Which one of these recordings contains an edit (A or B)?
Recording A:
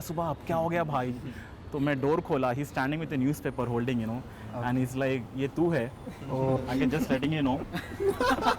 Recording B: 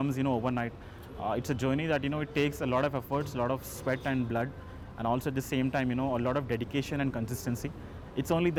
A